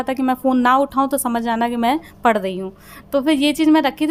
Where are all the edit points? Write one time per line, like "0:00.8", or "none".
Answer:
none